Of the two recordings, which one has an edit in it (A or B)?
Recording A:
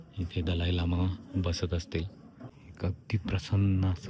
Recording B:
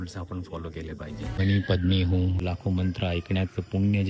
B